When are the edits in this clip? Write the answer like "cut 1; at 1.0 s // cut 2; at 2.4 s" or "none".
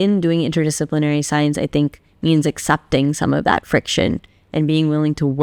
none